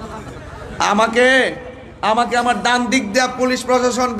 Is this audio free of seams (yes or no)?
yes